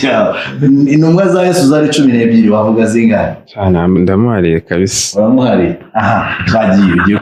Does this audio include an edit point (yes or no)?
no